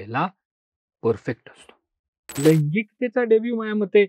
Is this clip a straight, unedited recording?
no; 1 cut; at 2.4 s

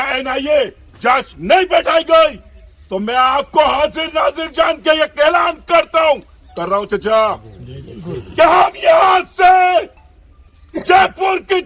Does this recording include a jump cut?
no; 0 cuts

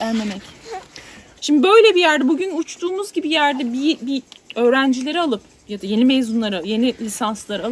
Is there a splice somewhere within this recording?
yes; 1 cut; at 1.3 s

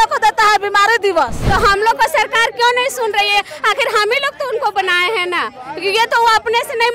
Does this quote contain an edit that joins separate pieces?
yes; 1 cut; at 1.4 s

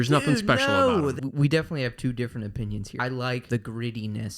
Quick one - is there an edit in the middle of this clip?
yes; 2 cuts; at 1.2 s, 3.0 s

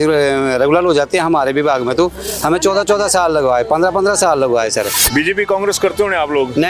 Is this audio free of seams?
yes; 0 cuts

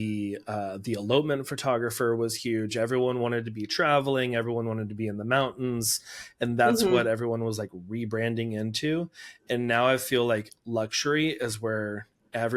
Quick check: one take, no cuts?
yes; 0 cuts

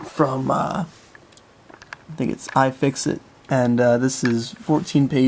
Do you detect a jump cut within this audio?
no; 0 cuts

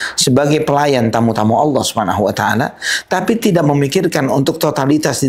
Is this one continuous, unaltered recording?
yes; 0 cuts

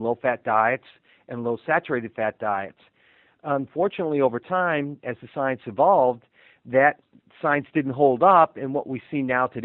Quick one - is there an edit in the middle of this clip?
no; 0 cuts

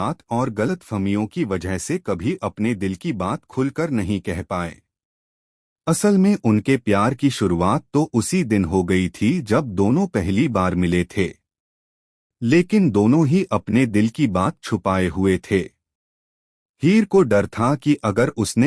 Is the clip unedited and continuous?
no; 1 cut; at 6.9 s

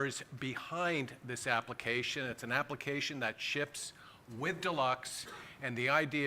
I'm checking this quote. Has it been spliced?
yes; 1 cut; at 5.0 s

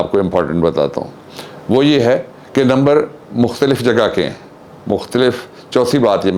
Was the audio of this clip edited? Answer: no; 0 cuts

